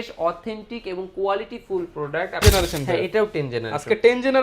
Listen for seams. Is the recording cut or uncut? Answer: cut